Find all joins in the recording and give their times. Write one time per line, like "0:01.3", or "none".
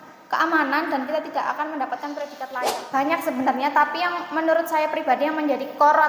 0:02.7